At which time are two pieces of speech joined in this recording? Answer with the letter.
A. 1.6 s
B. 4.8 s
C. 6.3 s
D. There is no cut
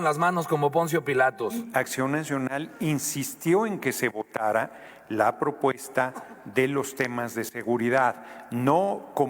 A